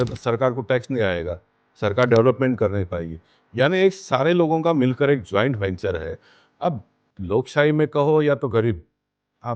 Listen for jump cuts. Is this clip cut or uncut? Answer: uncut